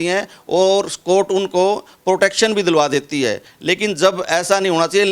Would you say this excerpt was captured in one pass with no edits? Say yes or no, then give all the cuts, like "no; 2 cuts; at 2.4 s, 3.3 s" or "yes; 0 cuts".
yes; 0 cuts